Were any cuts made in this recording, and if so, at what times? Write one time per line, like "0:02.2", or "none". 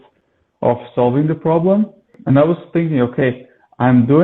0:02.1